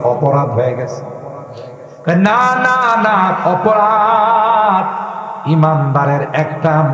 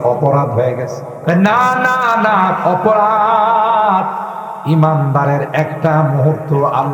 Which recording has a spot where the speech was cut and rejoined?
second; 1 cut; at 1.1 s

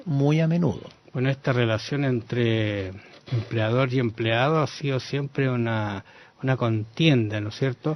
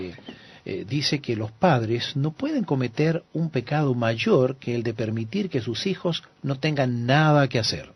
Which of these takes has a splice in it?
first; 1 cut; at 6.9 s

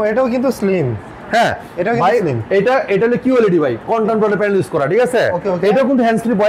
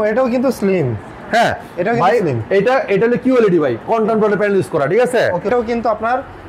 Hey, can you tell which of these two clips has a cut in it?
second; 1 cut; at 5.5 s

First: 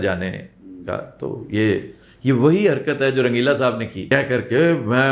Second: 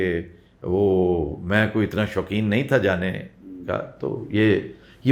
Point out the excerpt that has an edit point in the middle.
first; 1 cut; at 4.0 s

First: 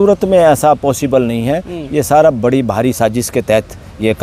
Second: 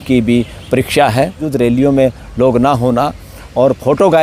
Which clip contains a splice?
second; 1 cut; at 1.4 s

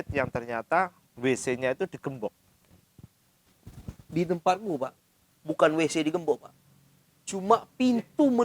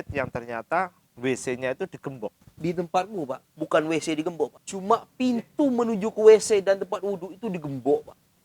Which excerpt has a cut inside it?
second; 3 cuts; at 2.5 s, 3.5 s, 4.7 s

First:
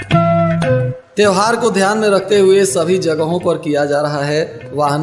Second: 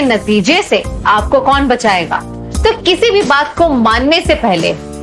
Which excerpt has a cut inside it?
first; 1 cut; at 1.0 s

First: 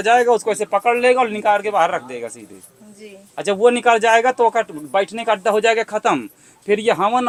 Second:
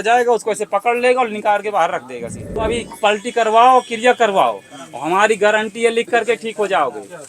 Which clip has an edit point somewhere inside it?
second; 1 cut; at 2.6 s

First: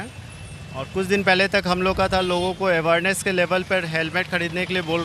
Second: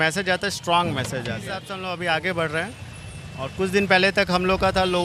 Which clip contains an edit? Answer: second; 1 cut; at 1.7 s

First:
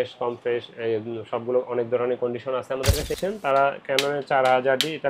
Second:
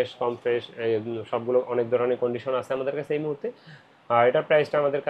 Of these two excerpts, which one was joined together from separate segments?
first; 1 cut; at 3.1 s

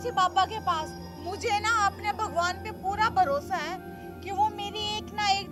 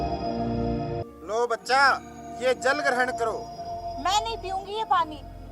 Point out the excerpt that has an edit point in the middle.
second; 1 cut; at 1.0 s

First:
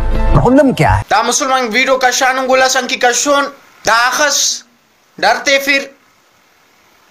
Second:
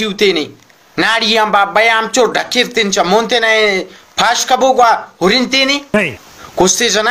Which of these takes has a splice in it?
first; 2 cuts; at 1.0 s, 3.7 s

